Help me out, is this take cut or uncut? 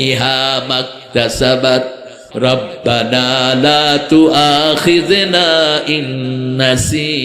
cut